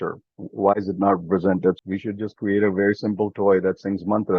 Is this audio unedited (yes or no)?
no